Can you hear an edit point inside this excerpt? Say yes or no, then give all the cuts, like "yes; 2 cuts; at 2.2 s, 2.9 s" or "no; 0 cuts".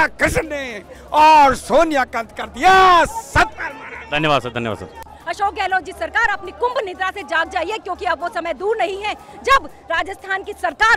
no; 0 cuts